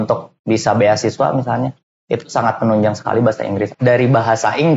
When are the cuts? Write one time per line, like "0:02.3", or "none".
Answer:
0:03.7